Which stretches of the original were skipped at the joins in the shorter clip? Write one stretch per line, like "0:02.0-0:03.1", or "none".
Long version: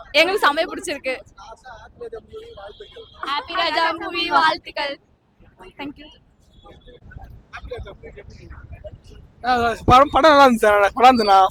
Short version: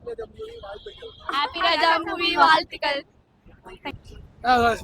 0:05.8-0:08.9